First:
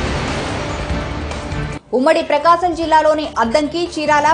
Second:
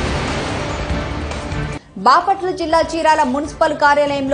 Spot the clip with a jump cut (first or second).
second